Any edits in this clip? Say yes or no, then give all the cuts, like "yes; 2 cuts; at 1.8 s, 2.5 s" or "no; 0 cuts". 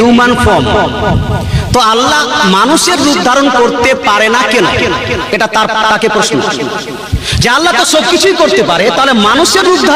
no; 0 cuts